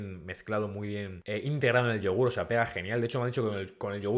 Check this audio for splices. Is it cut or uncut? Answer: cut